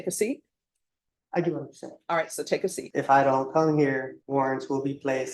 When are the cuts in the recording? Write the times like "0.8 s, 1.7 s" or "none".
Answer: 2.8 s, 4.2 s